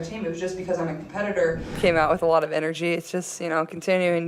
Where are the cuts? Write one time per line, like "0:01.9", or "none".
0:01.7